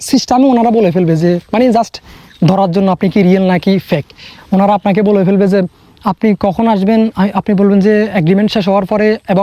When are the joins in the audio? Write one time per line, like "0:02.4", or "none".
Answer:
none